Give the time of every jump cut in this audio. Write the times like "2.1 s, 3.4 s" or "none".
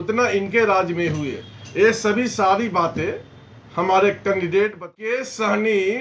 5.0 s